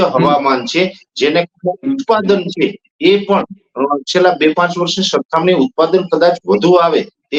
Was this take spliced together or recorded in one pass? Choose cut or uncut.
uncut